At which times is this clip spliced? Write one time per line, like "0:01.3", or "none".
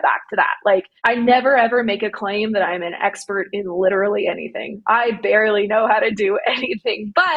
0:00.9

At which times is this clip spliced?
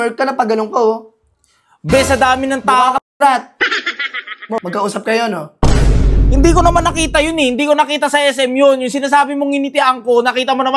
0:04.6

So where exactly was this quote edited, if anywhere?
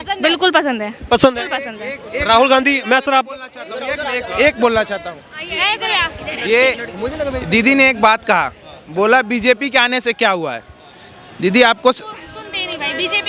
none

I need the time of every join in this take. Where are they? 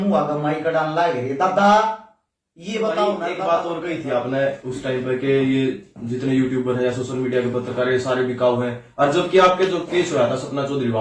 0:03.4

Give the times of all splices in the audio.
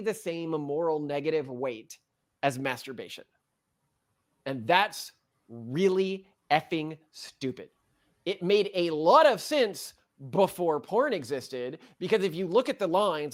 none

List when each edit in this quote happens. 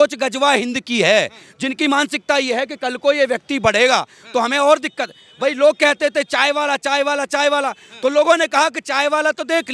none

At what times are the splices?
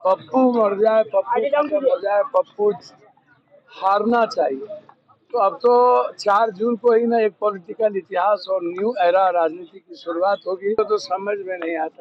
0:10.8

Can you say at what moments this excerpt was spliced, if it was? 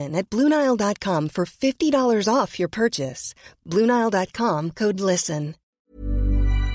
0:05.8

